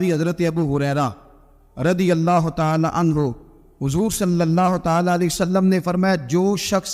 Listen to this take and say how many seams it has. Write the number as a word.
zero